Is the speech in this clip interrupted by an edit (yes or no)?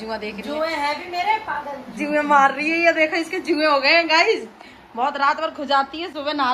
no